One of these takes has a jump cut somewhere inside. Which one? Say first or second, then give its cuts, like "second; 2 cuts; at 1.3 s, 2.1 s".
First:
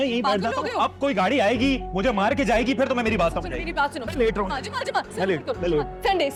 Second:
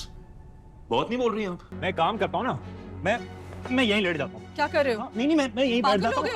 second; 1 cut; at 1.7 s